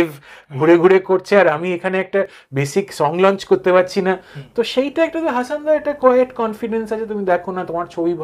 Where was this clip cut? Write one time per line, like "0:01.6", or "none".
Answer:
none